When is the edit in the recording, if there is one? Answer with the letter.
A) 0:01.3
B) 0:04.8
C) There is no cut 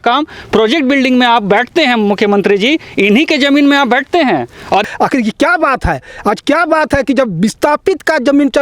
B